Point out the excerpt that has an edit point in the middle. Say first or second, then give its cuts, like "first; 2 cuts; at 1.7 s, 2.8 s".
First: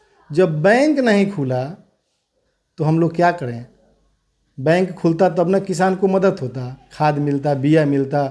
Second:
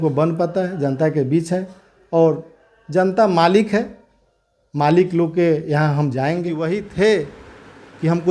second; 1 cut; at 6.6 s